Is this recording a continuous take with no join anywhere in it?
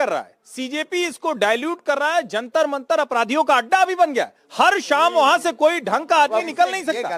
yes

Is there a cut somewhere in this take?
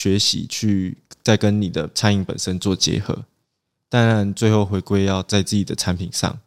no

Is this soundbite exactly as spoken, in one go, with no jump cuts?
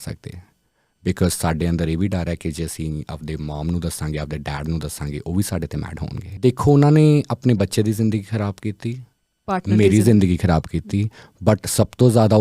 no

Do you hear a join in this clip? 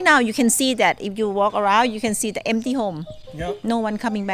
no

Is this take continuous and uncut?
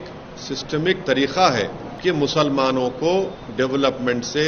no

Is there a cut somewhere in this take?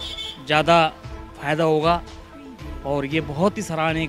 no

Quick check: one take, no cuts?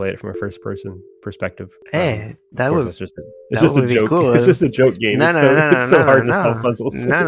yes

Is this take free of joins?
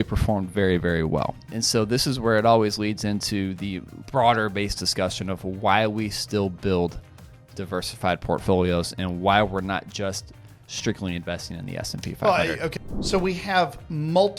no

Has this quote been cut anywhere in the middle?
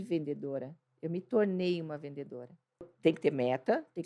yes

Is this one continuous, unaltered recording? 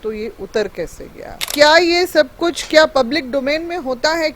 no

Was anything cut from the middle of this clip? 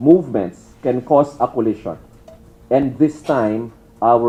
no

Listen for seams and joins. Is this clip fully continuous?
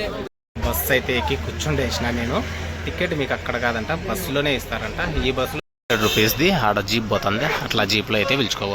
no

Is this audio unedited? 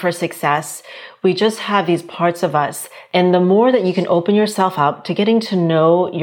no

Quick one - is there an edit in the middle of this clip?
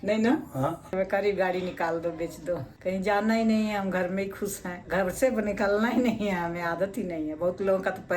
yes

